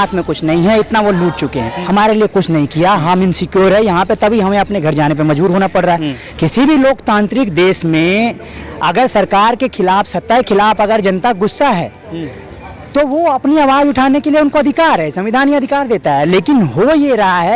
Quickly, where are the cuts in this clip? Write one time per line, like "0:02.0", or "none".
0:01.7
0:06.2